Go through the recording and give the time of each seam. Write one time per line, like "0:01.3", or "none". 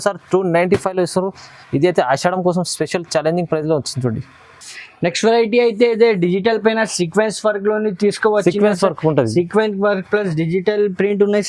none